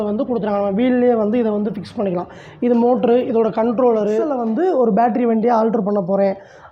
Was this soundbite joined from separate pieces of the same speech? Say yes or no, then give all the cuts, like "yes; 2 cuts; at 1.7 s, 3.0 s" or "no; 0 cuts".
yes; 1 cut; at 4.3 s